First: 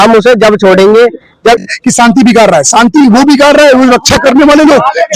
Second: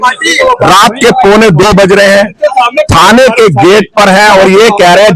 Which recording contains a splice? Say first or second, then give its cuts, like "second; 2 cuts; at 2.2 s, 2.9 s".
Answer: first; 1 cut; at 1.7 s